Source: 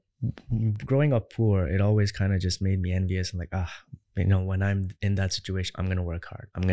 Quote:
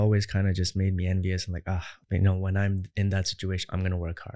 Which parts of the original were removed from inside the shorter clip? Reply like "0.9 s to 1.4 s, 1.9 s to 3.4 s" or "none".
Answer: 3.8 s to 4.0 s